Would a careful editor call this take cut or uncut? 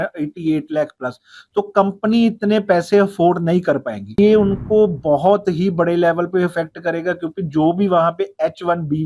cut